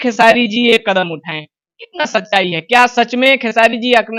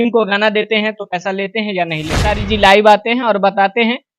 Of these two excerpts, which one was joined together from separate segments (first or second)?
second